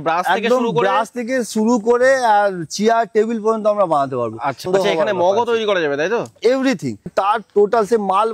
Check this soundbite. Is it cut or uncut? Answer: cut